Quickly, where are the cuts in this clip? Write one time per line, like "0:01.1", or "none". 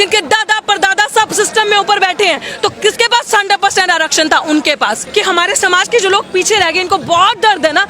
0:05.0